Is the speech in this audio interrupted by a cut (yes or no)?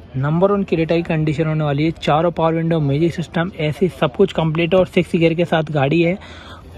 no